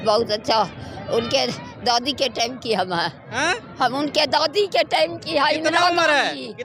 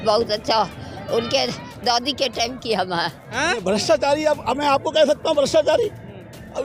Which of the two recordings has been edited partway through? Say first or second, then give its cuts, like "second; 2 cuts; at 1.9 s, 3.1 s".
second; 1 cut; at 3.6 s